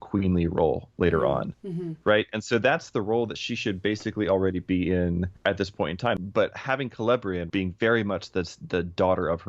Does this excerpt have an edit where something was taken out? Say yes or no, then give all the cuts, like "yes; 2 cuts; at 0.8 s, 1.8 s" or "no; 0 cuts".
yes; 3 cuts; at 5.3 s, 6.2 s, 7.4 s